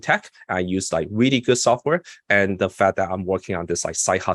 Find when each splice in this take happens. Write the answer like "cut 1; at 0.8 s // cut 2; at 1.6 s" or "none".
none